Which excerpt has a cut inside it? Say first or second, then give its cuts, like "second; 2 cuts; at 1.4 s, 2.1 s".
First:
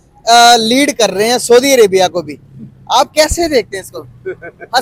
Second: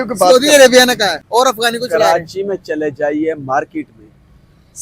second; 1 cut; at 1.2 s